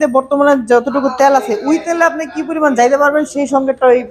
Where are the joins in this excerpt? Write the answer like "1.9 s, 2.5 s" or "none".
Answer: none